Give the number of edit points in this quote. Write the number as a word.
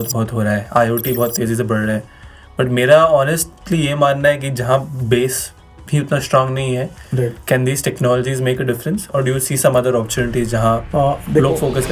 zero